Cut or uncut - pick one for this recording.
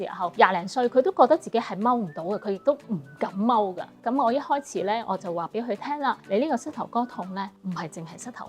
cut